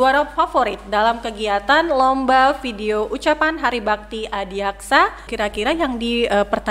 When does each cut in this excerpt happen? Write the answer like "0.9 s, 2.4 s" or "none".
5.3 s